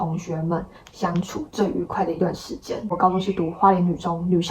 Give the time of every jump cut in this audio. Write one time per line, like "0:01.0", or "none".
0:02.9